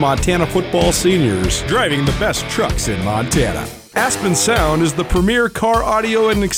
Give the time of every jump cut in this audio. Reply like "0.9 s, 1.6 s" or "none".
none